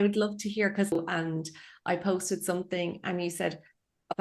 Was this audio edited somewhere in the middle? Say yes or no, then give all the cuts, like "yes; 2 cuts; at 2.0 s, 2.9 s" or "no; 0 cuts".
yes; 1 cut; at 0.9 s